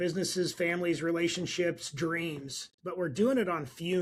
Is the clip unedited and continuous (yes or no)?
yes